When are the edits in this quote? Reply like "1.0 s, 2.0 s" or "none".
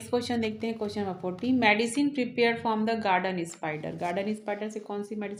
none